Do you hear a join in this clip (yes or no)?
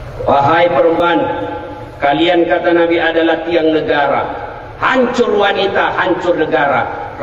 yes